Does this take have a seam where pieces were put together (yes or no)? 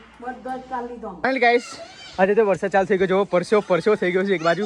yes